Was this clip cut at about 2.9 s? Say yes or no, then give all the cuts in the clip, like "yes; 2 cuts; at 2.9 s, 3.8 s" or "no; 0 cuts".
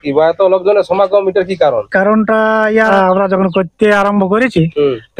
yes; 1 cut; at 2.9 s